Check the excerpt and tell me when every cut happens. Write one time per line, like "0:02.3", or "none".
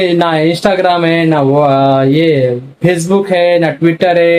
none